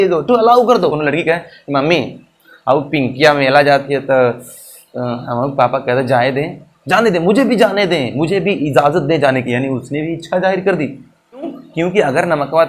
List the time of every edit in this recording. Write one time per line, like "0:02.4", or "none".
0:01.0
0:11.6